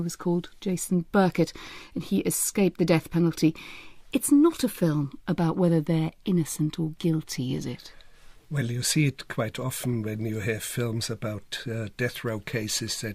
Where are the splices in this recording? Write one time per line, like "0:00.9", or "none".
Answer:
0:03.6

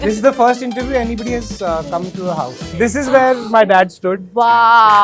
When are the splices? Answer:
none

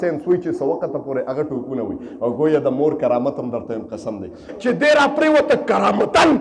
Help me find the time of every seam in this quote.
0:04.5

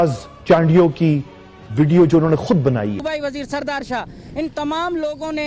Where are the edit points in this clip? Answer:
0:03.1

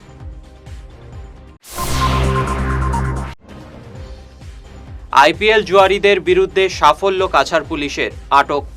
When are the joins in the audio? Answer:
0:04.7

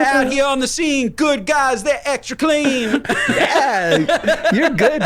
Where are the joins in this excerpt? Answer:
0:03.0

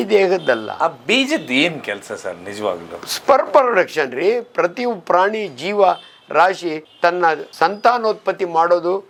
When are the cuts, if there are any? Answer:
none

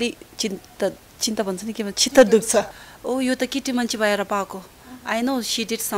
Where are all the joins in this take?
0:02.8

